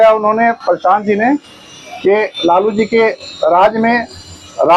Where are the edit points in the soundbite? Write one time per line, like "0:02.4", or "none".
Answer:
none